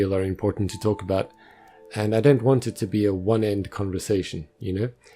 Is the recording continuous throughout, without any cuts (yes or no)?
no